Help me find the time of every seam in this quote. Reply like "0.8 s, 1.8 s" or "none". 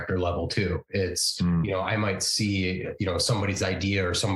none